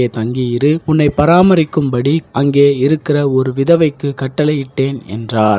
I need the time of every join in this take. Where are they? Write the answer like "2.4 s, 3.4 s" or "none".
0.8 s, 2.3 s